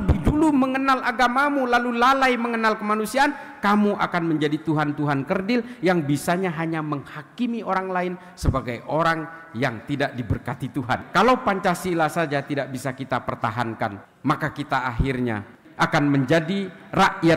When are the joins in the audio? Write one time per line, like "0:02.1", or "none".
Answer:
0:11.1
0:15.6